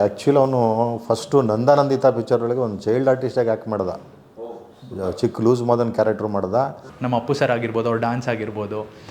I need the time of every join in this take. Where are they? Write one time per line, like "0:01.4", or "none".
0:06.9